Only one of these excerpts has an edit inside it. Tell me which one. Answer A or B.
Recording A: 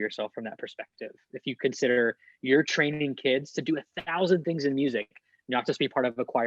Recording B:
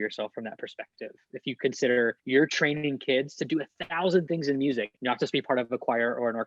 B